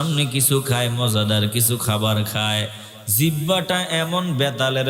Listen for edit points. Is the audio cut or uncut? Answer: uncut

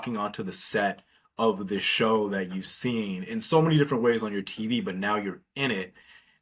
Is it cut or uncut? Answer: uncut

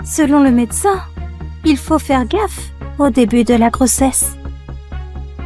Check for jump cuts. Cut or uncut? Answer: cut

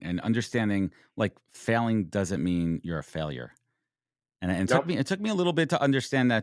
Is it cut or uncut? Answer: uncut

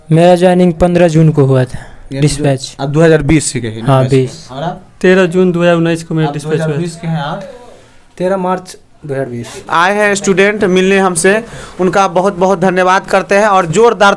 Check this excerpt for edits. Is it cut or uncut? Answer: cut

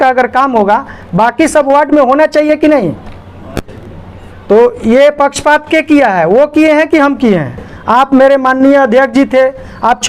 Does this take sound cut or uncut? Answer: cut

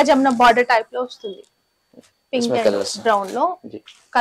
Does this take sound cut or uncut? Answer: uncut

